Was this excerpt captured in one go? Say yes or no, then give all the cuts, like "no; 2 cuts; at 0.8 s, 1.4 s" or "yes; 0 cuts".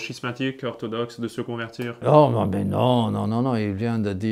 no; 1 cut; at 2.0 s